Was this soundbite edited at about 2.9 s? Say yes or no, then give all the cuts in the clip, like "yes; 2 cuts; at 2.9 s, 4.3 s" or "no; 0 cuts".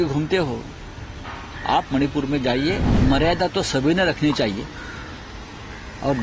yes; 1 cut; at 2.9 s